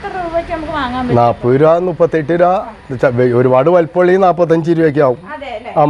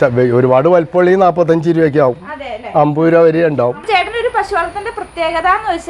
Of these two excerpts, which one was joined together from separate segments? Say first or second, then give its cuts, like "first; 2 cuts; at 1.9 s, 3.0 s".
second; 1 cut; at 3.8 s